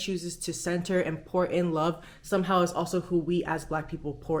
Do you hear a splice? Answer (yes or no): no